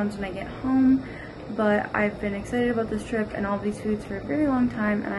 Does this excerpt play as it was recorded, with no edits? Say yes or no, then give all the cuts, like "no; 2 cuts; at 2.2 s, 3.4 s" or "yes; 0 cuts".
yes; 0 cuts